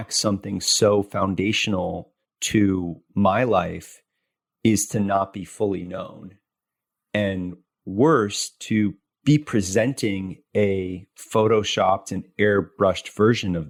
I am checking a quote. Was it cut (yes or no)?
no